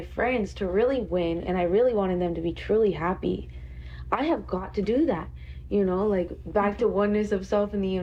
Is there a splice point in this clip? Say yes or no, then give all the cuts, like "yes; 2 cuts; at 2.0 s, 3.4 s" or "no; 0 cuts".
no; 0 cuts